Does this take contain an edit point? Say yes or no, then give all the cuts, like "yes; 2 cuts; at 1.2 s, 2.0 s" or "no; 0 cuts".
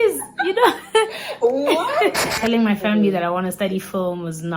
yes; 1 cut; at 2.3 s